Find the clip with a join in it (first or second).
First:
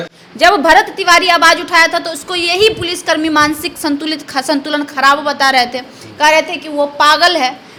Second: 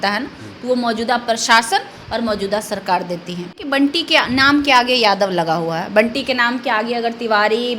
second